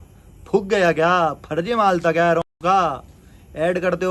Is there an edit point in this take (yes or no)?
no